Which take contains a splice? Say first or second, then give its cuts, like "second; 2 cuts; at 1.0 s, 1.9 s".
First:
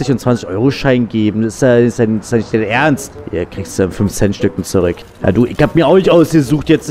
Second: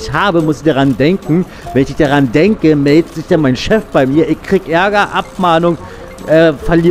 first; 2 cuts; at 3.2 s, 5.1 s